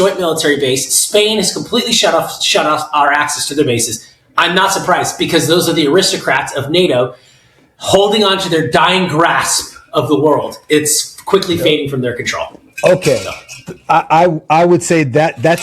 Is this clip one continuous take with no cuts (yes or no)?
yes